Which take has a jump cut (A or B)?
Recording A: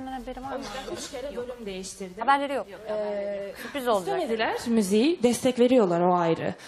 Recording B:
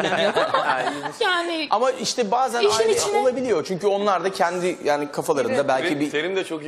B